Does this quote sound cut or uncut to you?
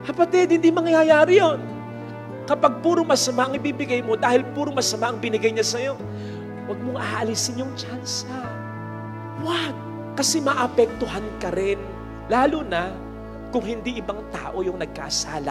uncut